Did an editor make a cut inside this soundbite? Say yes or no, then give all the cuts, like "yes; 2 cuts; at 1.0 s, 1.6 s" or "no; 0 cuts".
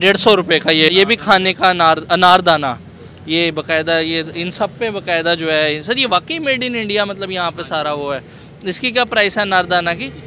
yes; 1 cut; at 0.9 s